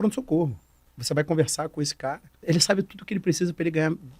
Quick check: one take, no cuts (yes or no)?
no